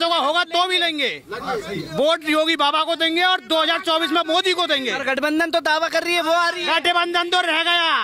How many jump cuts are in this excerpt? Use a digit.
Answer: 0